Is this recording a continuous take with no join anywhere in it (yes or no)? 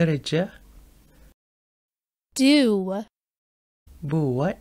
yes